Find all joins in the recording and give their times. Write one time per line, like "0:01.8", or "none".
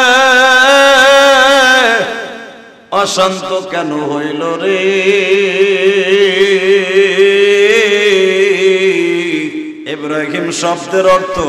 0:09.8